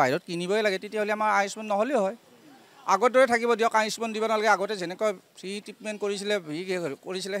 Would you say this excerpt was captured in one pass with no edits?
yes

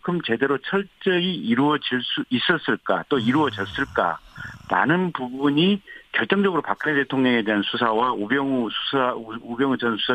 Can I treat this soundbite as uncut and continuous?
yes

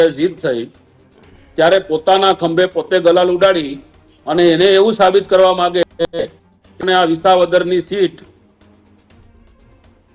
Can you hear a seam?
no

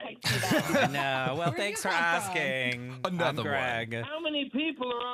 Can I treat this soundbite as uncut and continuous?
yes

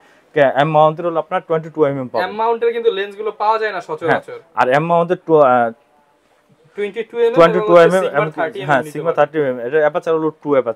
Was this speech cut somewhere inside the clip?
no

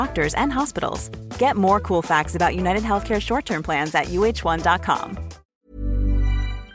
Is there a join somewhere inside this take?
yes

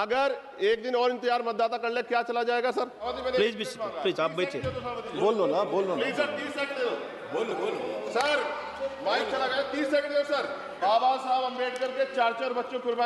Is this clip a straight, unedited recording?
no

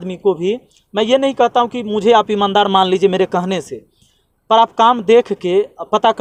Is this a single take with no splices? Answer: yes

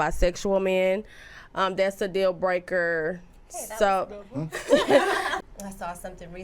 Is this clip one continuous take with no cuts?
no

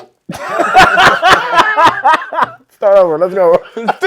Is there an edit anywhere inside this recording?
no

